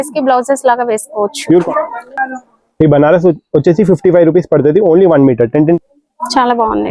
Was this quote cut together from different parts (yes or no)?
yes